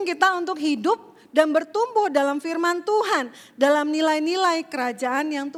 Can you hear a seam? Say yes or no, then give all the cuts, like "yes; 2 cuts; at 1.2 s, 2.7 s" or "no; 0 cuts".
no; 0 cuts